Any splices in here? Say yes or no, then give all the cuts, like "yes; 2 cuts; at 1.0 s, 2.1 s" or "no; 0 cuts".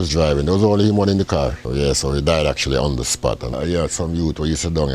yes; 2 cuts; at 1.6 s, 3.5 s